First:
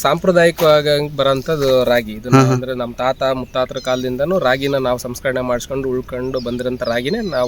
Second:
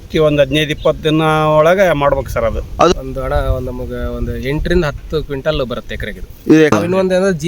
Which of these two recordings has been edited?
second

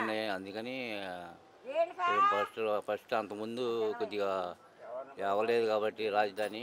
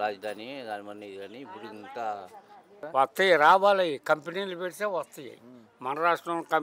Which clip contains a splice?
second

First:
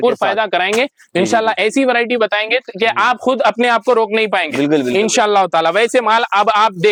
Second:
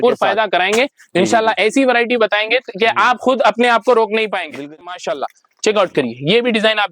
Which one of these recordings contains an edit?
second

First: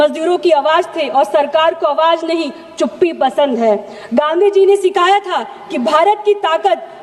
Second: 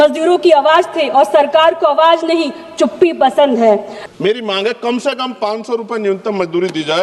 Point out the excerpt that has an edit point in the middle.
second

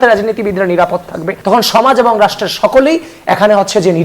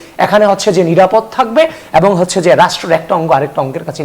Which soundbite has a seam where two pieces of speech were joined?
first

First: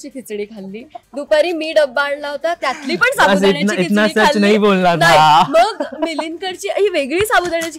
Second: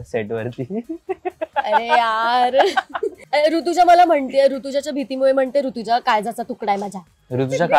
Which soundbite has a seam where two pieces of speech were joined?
second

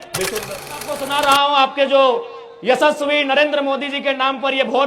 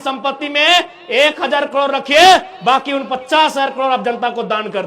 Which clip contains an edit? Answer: first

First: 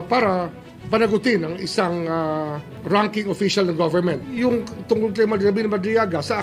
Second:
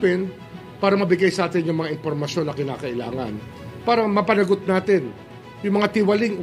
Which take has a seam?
first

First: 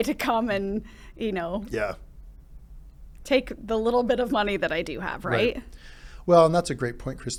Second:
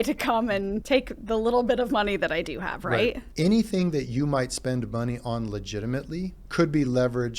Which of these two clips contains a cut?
second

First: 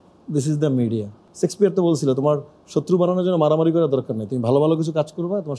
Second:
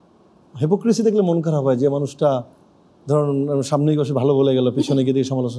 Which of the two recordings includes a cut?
first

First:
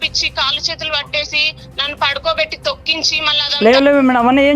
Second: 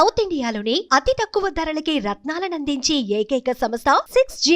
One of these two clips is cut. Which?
first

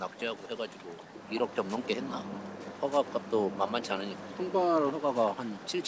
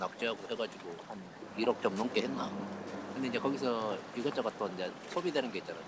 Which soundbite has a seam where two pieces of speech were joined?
first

